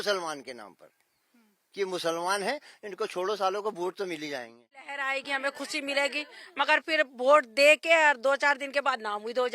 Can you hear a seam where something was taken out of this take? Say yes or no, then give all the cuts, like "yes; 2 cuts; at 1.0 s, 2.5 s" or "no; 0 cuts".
yes; 1 cut; at 4.9 s